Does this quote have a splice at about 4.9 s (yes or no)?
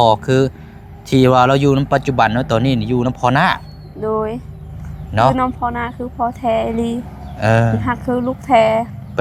no